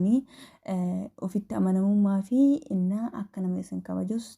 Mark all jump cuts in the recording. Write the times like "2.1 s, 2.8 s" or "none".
none

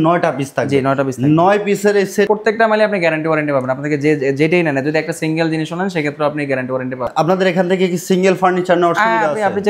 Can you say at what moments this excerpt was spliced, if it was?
2.3 s, 7.1 s

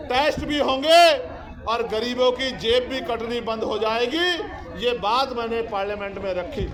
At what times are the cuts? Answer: none

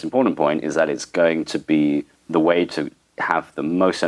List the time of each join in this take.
2.2 s

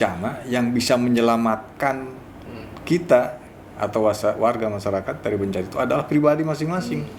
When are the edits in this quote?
none

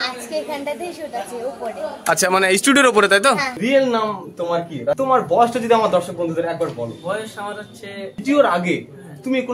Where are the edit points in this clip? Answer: 3.5 s, 5.0 s, 8.1 s

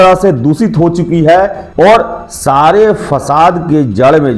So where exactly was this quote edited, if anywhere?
1.6 s

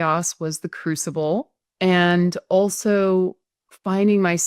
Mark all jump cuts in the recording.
1.6 s

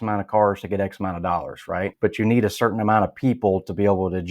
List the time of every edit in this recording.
1.9 s

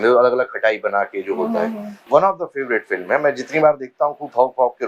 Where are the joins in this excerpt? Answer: 1.9 s

